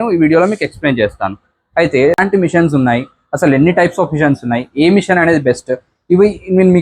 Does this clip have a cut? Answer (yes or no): yes